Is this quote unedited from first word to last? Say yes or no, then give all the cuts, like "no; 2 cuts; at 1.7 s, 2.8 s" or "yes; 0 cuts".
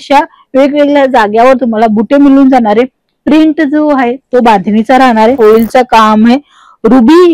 no; 1 cut; at 5.3 s